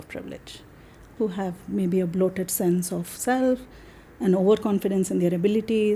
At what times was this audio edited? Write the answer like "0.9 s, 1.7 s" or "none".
1.1 s